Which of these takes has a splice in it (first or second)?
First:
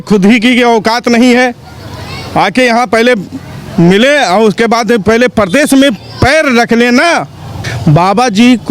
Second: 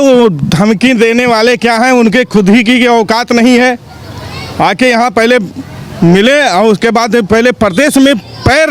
first